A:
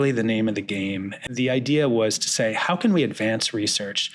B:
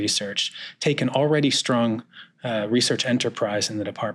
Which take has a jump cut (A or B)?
A